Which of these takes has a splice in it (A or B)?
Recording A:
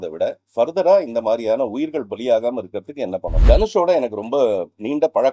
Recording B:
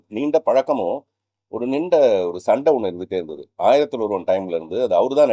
A